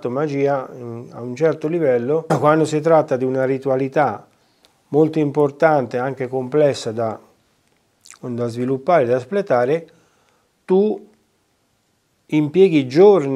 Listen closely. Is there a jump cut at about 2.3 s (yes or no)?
yes